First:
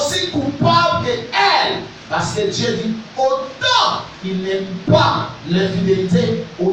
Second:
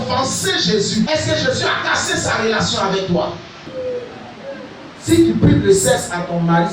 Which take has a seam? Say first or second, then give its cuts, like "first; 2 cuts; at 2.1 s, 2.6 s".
second; 2 cuts; at 1.1 s, 3.7 s